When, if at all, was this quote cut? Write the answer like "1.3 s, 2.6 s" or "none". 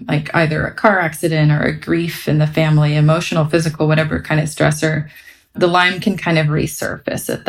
none